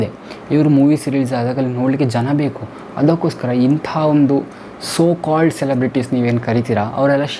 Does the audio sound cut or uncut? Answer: uncut